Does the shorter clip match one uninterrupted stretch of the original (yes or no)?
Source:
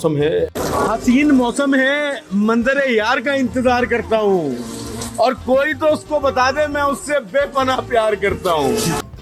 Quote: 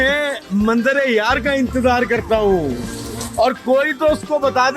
yes